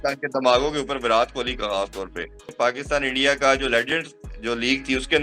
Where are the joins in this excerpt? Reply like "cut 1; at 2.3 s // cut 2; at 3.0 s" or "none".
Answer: cut 1; at 2.4 s